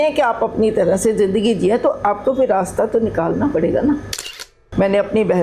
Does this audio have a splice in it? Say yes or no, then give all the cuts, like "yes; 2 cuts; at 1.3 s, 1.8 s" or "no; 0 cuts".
yes; 1 cut; at 4.2 s